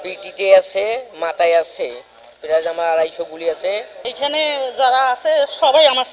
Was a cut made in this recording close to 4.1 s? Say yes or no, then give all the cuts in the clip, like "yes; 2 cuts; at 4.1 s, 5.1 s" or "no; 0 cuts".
yes; 1 cut; at 4.1 s